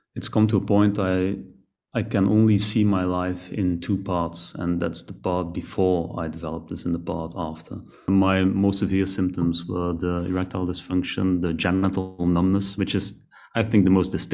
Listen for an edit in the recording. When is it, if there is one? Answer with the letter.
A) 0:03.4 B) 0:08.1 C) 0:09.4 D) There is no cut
B